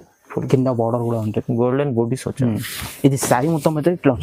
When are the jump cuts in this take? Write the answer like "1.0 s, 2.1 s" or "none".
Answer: none